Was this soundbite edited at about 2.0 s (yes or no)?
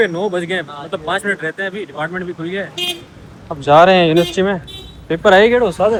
no